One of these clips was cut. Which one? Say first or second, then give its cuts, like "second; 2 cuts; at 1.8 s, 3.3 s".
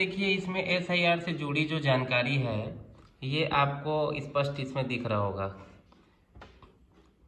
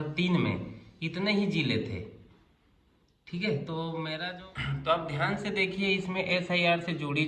second; 1 cut; at 4.3 s